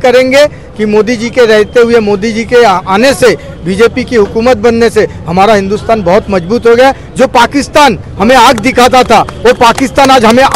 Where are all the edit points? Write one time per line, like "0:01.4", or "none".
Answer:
none